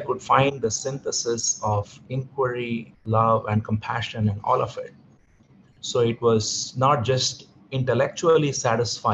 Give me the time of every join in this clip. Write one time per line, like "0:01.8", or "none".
0:02.9